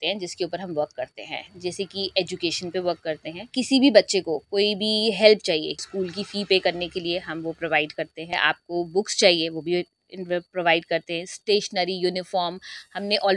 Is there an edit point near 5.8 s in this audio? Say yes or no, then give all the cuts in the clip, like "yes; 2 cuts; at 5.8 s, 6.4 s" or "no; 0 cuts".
yes; 3 cuts; at 3.5 s, 5.8 s, 8.5 s